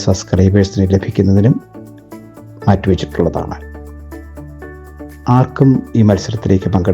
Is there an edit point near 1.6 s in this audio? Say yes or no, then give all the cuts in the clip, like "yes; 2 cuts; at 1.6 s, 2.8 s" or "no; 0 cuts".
no; 2 cuts; at 3.8 s, 5.2 s